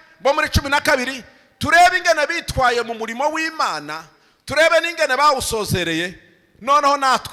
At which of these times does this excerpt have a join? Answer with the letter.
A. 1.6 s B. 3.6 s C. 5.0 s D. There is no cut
D